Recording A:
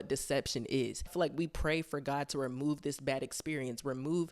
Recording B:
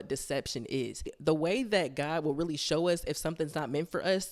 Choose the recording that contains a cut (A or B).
A